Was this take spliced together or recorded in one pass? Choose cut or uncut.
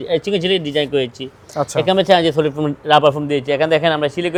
uncut